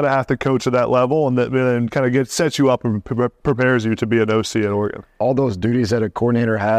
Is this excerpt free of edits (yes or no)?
no